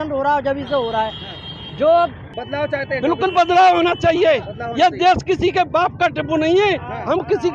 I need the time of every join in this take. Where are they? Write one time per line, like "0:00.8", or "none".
0:02.4